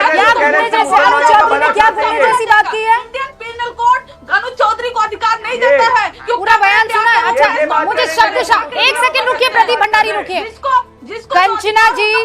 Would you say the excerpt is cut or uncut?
uncut